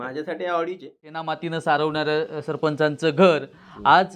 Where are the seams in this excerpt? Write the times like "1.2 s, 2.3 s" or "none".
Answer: 1.3 s